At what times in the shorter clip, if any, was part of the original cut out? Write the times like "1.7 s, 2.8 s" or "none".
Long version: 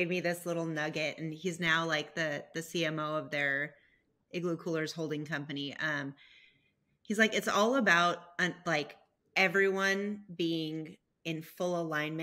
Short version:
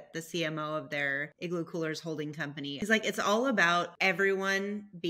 1.3 s, 2.8 s, 3.9 s